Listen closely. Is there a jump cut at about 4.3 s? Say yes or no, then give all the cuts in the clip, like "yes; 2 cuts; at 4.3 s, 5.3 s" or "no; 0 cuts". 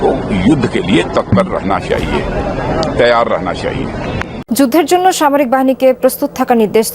yes; 1 cut; at 4.3 s